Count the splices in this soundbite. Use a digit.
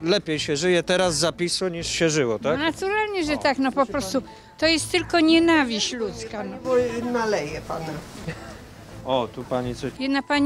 0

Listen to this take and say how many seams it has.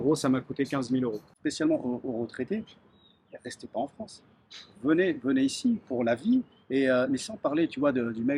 1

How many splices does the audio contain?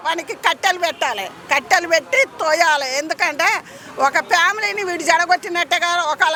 0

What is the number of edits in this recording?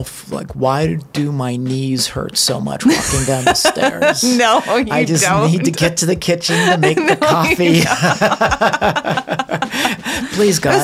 0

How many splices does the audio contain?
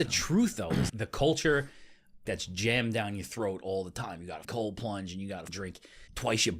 4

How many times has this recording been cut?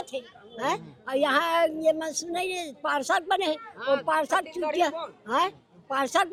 0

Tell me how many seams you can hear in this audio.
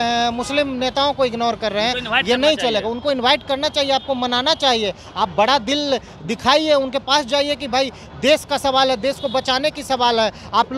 0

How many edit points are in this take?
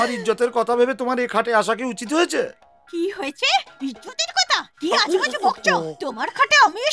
0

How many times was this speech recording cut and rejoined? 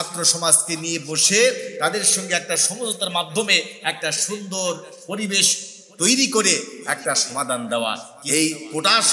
1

